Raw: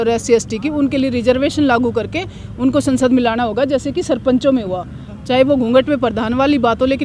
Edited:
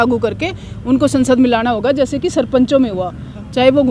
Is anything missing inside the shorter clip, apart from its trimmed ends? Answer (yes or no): no